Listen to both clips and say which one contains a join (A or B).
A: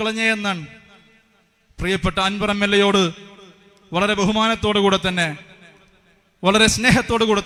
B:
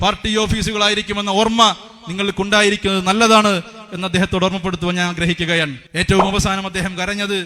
B